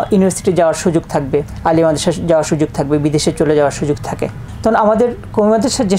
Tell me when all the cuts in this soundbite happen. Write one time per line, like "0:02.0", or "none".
0:01.5